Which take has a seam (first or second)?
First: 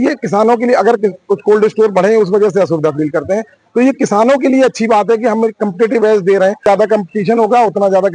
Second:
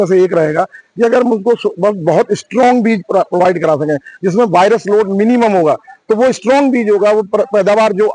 first